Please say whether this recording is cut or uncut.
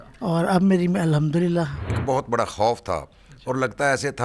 cut